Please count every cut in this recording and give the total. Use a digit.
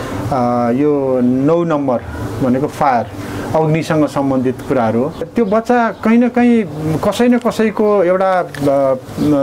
1